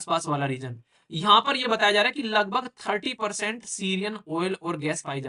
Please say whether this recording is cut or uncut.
uncut